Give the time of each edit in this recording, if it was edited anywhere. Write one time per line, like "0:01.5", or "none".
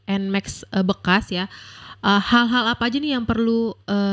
none